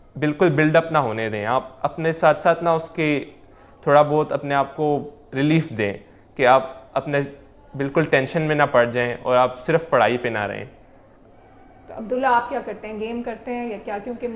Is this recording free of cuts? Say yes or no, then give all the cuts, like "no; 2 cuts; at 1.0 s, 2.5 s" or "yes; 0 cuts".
yes; 0 cuts